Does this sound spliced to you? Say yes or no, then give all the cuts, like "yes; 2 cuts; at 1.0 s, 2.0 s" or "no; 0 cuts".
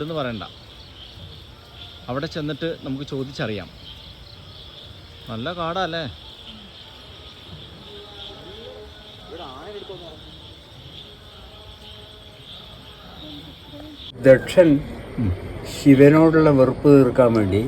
yes; 1 cut; at 14.2 s